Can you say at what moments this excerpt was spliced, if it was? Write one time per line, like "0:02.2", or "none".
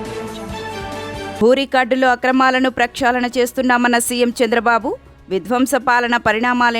0:01.4